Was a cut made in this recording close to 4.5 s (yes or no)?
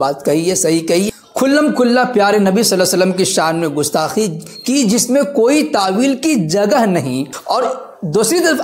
no